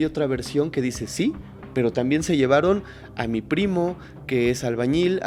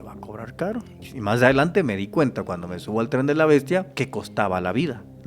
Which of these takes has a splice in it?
second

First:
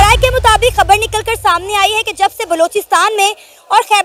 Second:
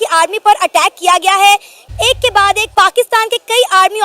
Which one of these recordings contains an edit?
second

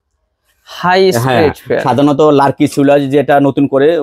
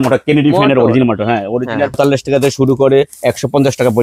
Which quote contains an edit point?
second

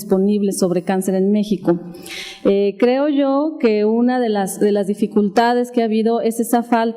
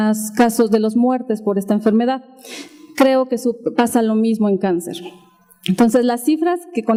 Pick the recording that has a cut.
first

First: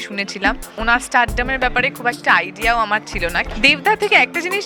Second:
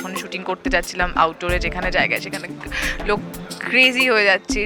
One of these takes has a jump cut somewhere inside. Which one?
first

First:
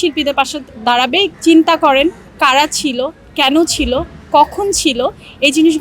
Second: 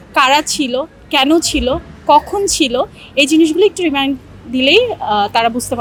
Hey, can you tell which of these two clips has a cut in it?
first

